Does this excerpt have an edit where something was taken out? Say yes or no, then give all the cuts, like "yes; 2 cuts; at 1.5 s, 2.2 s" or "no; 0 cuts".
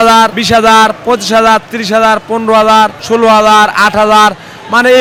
no; 0 cuts